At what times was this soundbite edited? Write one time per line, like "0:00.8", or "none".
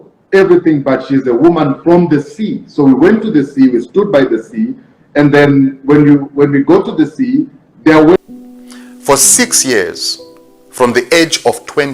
0:08.2